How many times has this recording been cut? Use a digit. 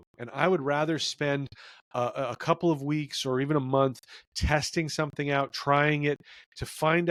0